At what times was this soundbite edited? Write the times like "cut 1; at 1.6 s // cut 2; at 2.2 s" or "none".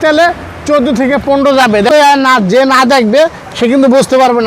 cut 1; at 1.9 s